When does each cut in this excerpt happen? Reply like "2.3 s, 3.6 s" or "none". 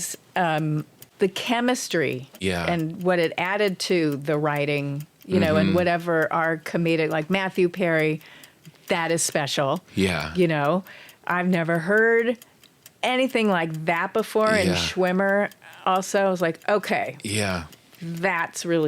1.0 s, 2.3 s